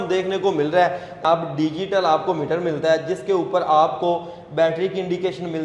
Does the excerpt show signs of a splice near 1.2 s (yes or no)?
yes